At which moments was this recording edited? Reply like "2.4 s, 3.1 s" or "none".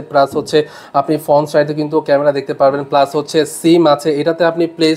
none

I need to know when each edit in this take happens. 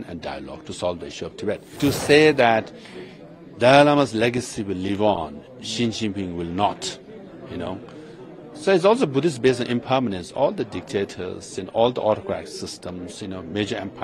1.7 s

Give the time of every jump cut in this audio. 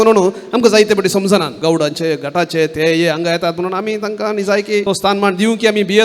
1.5 s, 4.8 s

